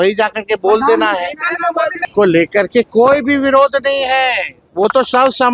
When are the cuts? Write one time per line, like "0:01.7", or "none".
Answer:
0:02.0